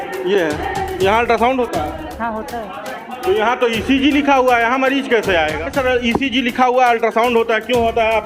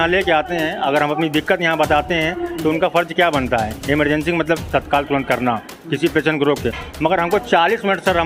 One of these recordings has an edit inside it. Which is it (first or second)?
first